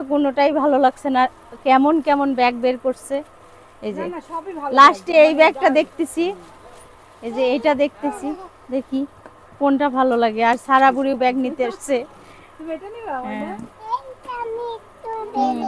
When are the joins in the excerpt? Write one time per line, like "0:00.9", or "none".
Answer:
none

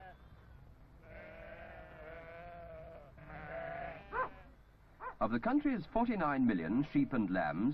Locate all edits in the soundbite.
0:01.4

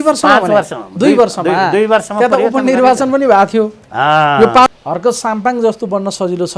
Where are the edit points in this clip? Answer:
0:04.7

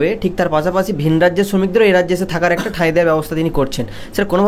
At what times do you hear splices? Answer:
none

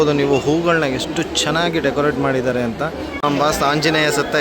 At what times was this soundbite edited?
0:03.1

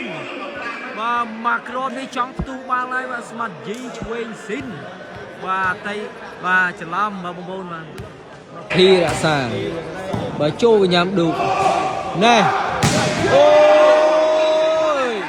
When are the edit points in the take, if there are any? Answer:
0:08.7

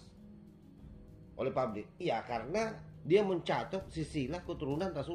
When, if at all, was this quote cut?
0:02.9

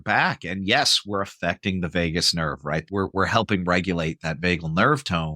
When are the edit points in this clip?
0:02.8

